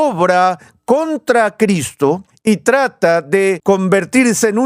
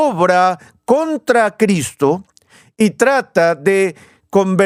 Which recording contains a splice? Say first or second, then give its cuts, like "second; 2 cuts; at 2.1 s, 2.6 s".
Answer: first; 2 cuts; at 2.3 s, 3.6 s